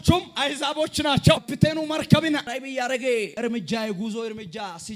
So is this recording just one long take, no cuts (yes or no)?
no